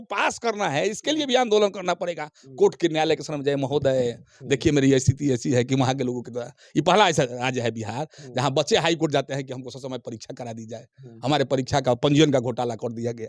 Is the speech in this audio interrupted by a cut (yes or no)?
no